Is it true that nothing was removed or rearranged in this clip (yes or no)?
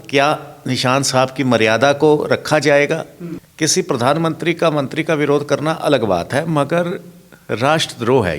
no